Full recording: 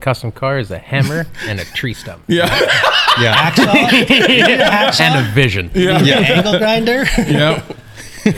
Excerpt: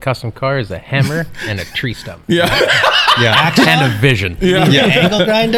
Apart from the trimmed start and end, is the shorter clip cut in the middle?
yes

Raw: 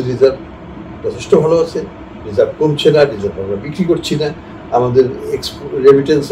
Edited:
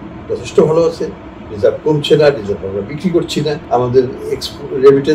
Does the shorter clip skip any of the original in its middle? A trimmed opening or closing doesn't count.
yes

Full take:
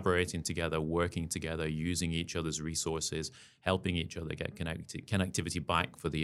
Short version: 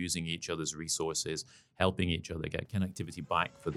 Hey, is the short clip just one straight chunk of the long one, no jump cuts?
no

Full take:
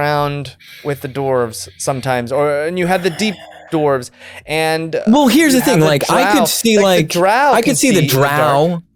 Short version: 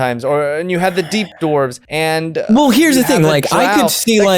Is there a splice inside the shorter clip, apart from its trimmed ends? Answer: yes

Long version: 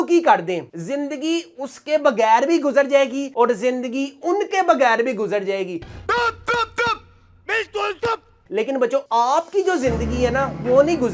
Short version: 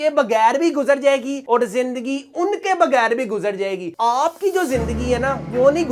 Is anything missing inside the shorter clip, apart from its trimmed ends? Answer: yes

